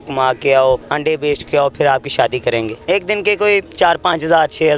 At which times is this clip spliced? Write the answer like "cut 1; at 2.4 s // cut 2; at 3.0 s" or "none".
cut 1; at 0.9 s // cut 2; at 2.8 s // cut 3; at 3.7 s